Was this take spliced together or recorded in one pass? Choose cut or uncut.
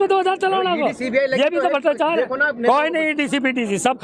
uncut